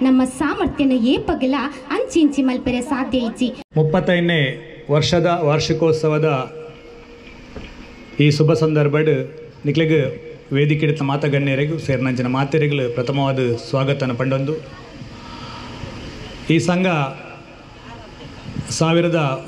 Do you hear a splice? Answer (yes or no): yes